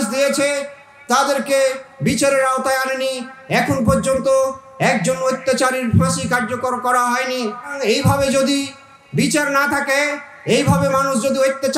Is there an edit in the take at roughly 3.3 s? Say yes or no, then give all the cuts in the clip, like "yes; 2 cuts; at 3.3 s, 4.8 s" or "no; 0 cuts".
no; 1 cut; at 7.7 s